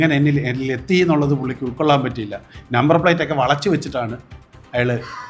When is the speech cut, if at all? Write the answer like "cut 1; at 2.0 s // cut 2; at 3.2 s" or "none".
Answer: none